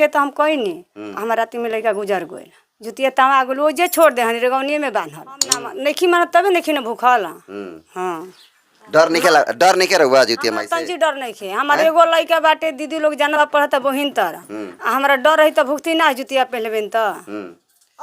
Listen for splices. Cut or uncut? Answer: cut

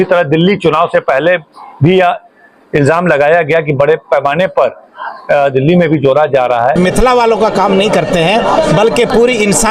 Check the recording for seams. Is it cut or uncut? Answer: cut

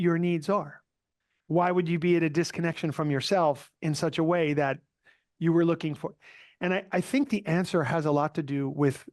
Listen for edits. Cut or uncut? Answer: uncut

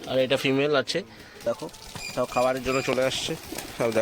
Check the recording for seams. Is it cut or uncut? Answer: cut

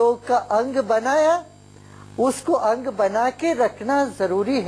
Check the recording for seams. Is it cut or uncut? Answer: uncut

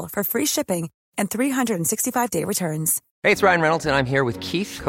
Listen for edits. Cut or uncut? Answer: cut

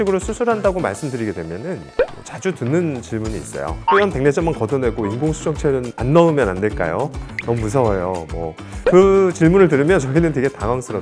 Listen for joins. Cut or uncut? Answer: uncut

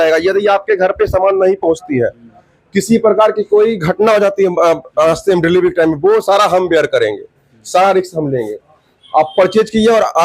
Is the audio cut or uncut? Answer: uncut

